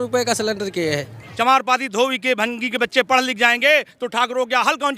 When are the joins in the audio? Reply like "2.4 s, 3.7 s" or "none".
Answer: 1.2 s